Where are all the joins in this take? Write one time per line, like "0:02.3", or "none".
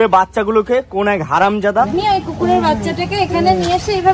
0:01.9